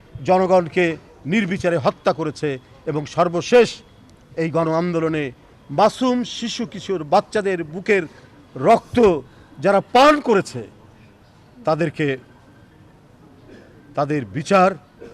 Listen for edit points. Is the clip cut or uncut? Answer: uncut